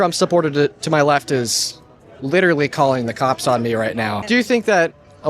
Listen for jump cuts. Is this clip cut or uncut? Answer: cut